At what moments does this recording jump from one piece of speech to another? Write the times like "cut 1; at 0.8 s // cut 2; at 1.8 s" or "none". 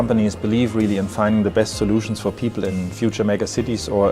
cut 1; at 2.7 s